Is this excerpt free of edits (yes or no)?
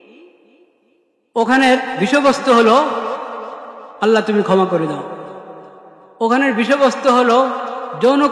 yes